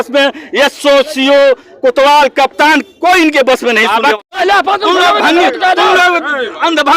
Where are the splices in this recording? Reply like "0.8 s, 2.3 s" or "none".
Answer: 4.3 s